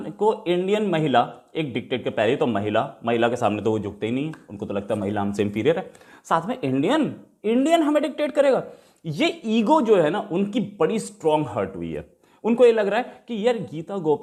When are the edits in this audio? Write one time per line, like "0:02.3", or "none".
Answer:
none